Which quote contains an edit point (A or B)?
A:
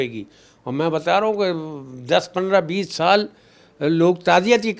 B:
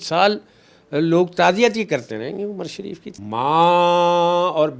B